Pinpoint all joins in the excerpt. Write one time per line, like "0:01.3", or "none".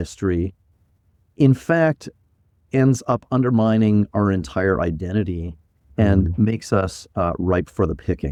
none